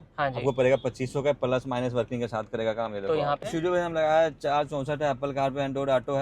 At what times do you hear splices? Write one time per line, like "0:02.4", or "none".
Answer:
0:03.4